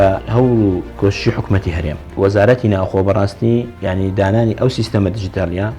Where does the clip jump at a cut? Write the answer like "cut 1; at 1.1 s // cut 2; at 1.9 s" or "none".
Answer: cut 1; at 0.9 s // cut 2; at 2.0 s